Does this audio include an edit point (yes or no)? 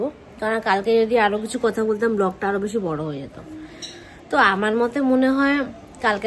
no